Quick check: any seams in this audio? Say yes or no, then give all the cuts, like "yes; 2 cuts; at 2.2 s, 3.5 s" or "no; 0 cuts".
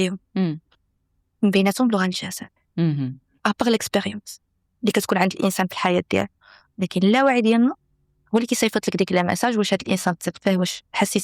no; 0 cuts